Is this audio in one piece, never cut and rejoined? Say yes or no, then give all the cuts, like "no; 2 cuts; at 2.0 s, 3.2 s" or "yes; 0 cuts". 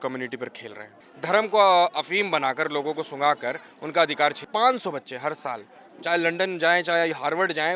no; 2 cuts; at 0.9 s, 4.4 s